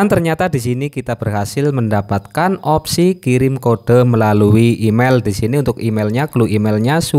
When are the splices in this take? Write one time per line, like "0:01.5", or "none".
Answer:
none